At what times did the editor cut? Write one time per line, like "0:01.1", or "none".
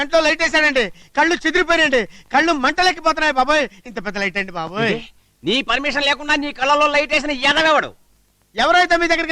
none